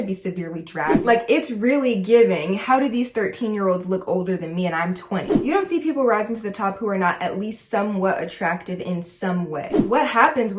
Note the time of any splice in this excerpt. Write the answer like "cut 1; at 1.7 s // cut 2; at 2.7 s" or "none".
cut 1; at 1.0 s // cut 2; at 5.3 s // cut 3; at 9.8 s